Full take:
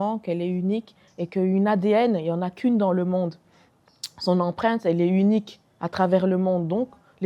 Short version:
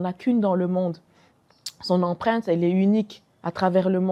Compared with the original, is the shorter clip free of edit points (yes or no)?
yes